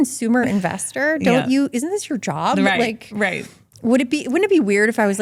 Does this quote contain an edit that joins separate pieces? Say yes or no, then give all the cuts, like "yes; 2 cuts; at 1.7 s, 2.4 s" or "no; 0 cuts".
no; 0 cuts